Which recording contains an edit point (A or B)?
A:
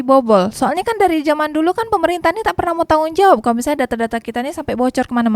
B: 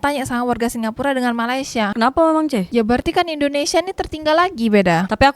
B